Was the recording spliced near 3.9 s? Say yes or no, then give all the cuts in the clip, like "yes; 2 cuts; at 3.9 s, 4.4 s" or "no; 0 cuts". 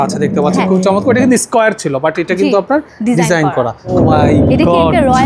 yes; 1 cut; at 3.9 s